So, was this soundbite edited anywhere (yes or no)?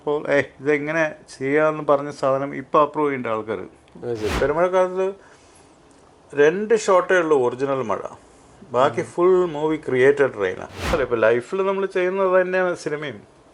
yes